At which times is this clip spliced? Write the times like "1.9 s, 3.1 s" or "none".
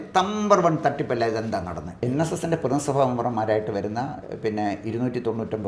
2.0 s